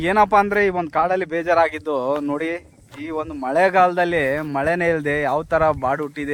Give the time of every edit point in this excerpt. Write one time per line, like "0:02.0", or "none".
none